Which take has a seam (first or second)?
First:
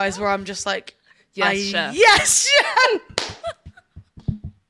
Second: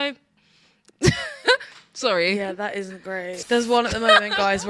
second